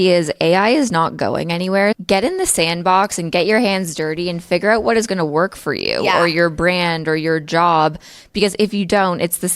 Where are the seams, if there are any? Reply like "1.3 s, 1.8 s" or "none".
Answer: 2.0 s

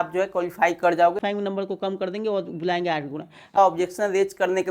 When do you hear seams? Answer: 1.2 s, 3.6 s

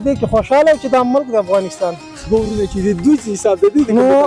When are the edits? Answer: 2.3 s

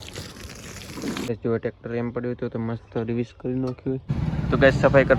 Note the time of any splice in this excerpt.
1.3 s, 4.0 s

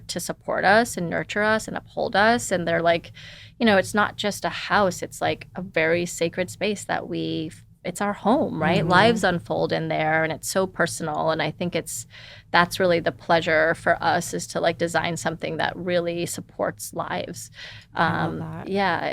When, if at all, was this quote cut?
none

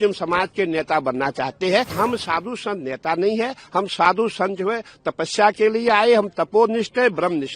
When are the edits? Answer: 1.9 s

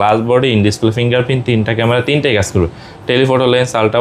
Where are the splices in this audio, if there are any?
none

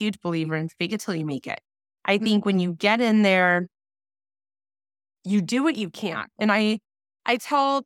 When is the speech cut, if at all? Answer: none

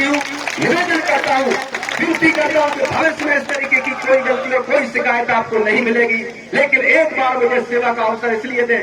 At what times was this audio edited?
none

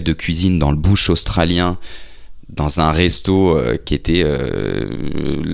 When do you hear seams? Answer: none

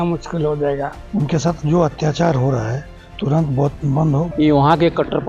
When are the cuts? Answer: 1.0 s, 4.3 s

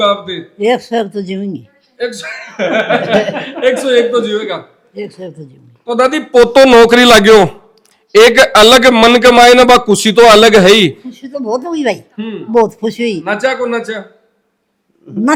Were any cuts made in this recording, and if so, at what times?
none

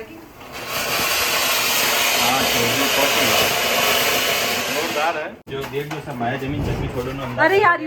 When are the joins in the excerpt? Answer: 5.4 s

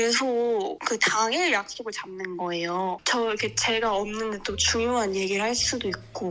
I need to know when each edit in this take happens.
0.8 s, 3.0 s

